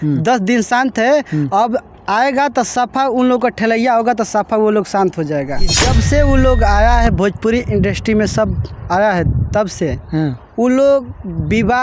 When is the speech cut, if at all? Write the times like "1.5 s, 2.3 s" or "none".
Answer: 5.7 s

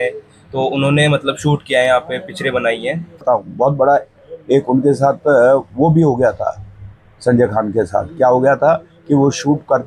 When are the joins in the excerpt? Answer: 3.2 s

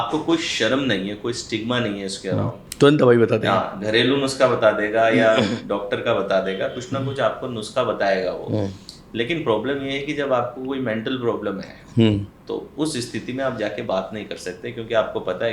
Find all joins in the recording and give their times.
2.6 s

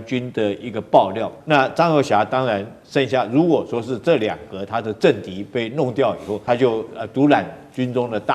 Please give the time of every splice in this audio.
1.3 s, 6.4 s

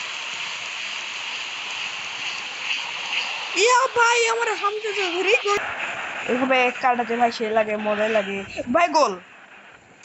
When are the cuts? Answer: 5.6 s

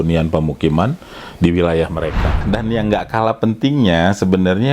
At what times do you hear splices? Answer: 2.4 s

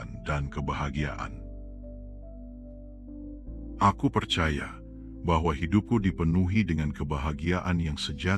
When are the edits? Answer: none

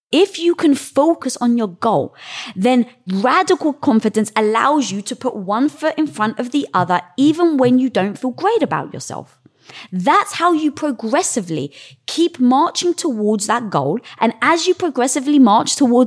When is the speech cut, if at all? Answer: 1.2 s

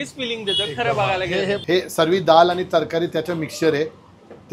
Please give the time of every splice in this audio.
1.6 s

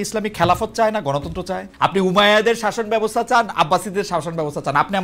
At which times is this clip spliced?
1.6 s

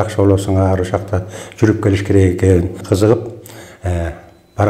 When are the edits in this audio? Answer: 2.8 s

